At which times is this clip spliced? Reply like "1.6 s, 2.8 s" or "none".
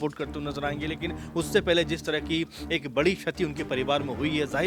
none